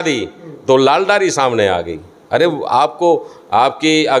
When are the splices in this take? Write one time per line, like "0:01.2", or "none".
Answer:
none